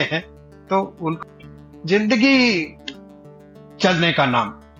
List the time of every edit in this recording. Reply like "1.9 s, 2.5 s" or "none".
1.1 s